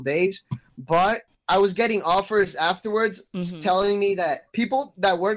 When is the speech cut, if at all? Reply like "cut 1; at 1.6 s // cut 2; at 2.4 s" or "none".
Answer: cut 1; at 1.3 s